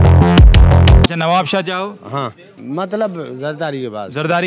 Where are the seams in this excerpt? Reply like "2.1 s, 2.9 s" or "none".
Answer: 1.1 s